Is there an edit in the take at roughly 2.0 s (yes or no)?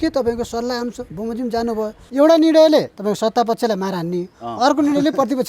yes